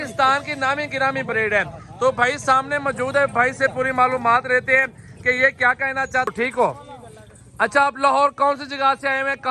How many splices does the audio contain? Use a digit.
1